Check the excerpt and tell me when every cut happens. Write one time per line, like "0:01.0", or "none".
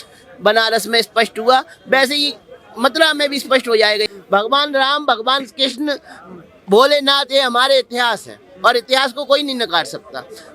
0:04.1